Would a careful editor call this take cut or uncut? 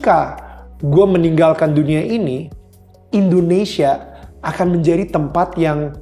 uncut